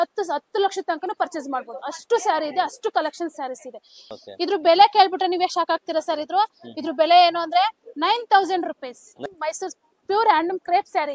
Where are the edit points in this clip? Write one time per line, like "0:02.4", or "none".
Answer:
0:04.0
0:09.2